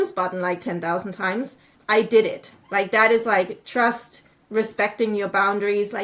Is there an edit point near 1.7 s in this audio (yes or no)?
yes